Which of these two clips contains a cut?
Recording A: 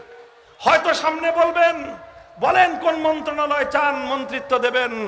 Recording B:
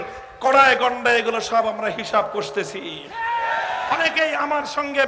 B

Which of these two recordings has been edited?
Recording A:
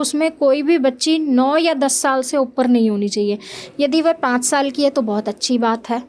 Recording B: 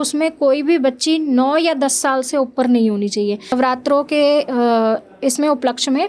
B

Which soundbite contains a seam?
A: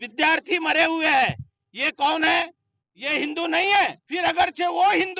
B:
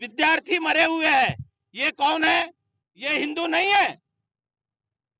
A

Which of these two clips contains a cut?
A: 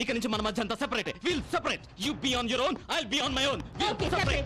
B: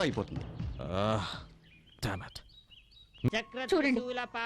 B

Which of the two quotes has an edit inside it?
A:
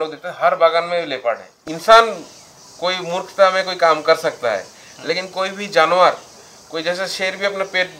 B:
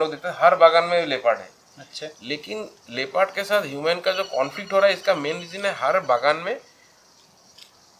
A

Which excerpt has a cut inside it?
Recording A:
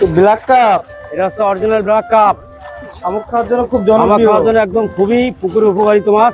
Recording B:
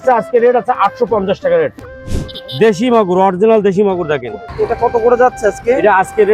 B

